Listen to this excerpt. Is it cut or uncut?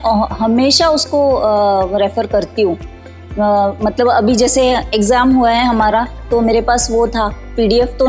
uncut